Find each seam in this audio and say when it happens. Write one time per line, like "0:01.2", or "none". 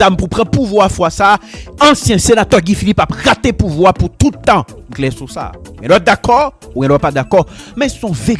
none